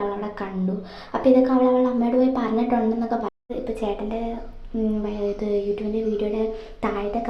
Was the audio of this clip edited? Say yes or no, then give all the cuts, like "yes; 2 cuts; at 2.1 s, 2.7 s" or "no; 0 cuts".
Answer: yes; 1 cut; at 3.5 s